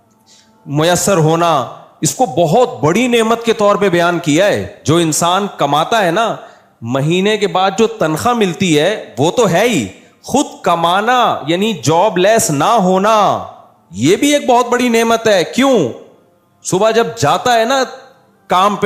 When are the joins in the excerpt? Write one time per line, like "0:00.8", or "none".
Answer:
0:04.7